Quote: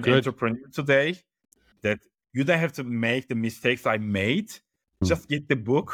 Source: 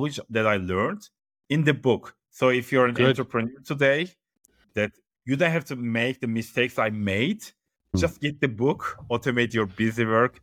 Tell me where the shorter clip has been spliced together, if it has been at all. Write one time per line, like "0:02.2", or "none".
none